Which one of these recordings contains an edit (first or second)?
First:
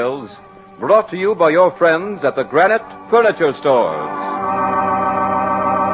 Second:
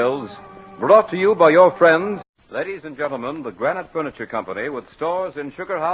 first